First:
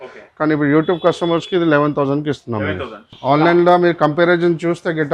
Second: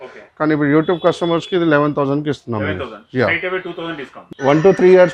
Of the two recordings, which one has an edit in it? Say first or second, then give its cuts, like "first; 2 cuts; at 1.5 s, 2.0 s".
first; 1 cut; at 3.1 s